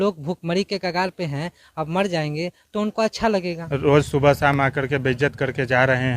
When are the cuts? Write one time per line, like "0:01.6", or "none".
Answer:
0:03.6